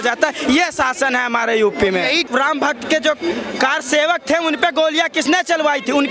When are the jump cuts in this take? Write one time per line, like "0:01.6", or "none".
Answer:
0:02.3

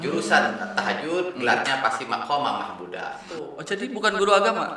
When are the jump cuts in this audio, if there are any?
0:03.2

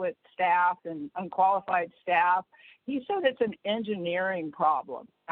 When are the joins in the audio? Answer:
none

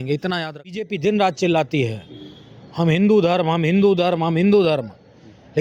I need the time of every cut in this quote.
0:00.9

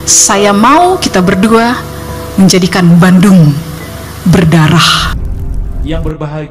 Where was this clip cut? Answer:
0:05.2

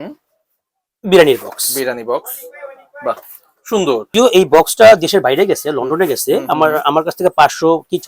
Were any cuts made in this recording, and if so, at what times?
0:04.1

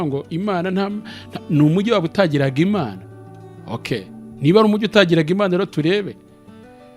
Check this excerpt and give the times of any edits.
none

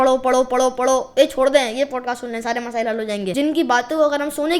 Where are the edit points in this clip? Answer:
0:03.3

